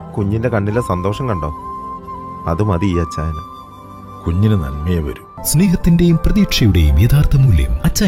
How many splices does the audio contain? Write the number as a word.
zero